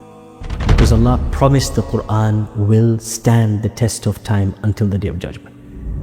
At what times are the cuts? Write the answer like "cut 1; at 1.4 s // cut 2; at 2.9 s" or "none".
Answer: none